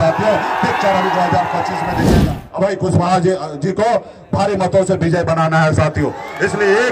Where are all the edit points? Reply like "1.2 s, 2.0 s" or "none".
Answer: 2.3 s